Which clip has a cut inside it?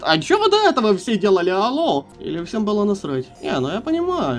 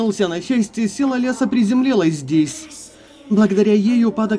first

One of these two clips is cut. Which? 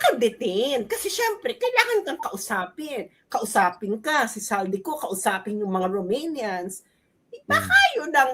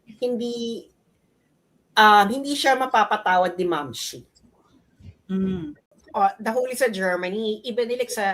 second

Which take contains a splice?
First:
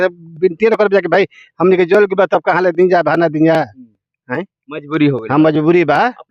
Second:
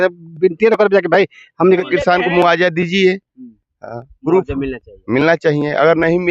second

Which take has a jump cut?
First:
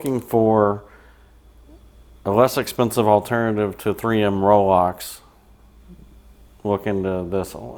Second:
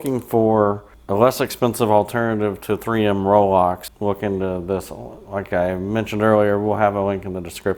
second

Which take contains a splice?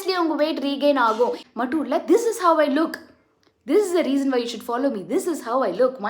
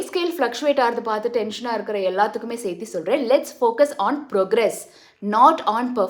first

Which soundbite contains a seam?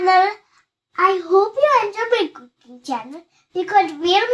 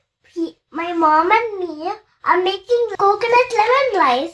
second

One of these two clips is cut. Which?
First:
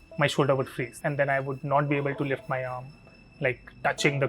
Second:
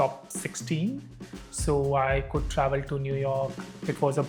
first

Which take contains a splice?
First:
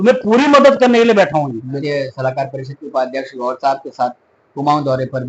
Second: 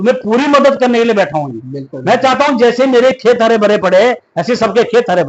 first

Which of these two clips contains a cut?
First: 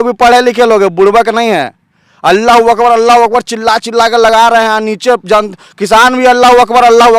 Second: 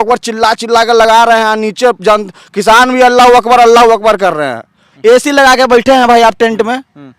second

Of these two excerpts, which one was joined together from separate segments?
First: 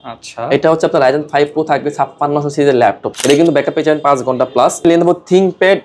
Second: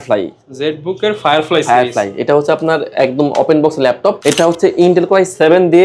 first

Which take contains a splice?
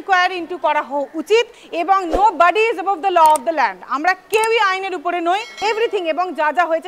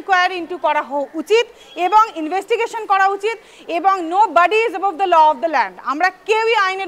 first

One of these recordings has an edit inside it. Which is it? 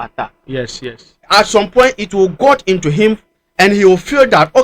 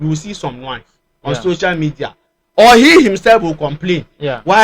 first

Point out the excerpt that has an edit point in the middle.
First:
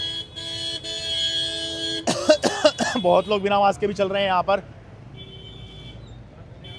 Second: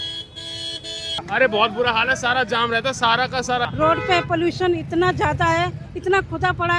second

